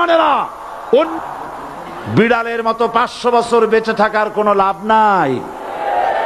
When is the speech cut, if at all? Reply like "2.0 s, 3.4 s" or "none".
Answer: 1.1 s